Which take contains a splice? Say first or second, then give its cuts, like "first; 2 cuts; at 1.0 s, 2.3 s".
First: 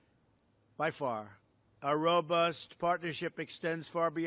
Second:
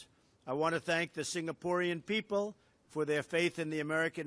second; 1 cut; at 2.6 s